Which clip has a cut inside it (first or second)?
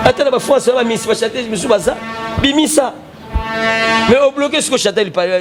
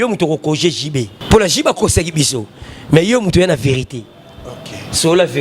second